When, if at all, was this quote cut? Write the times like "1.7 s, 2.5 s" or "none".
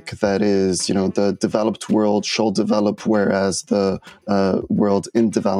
none

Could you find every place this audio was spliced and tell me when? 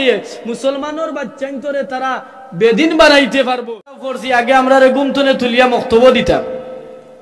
4.1 s

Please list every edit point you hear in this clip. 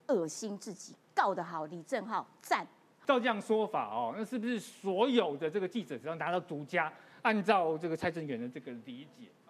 2.9 s

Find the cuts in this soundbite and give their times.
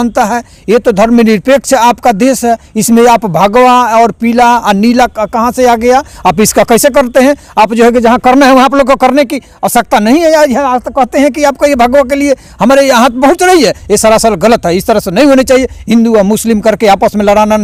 none

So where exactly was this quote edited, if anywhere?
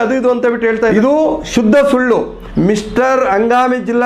0.9 s, 2.4 s

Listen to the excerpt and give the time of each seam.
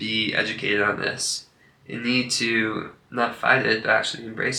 none

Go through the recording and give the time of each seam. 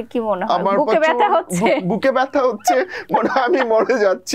none

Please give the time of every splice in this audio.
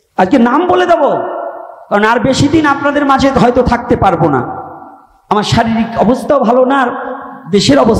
none

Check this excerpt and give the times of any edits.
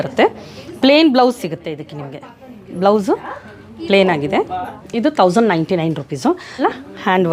4.8 s, 6.6 s

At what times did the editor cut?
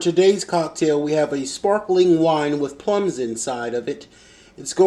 none

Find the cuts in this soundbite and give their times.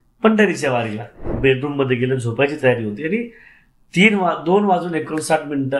1.3 s

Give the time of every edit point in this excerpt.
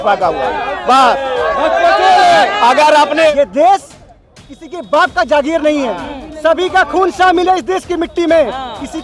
3.3 s

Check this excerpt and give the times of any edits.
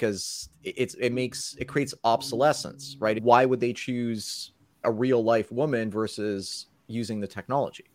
3.2 s

